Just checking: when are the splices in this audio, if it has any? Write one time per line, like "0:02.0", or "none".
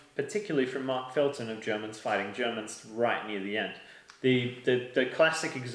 none